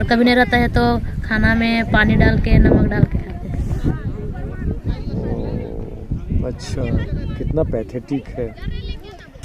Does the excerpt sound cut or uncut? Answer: uncut